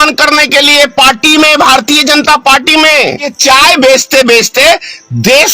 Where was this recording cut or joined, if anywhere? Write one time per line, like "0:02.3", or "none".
0:03.3